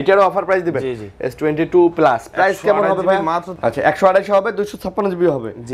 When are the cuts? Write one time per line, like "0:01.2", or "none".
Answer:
0:03.5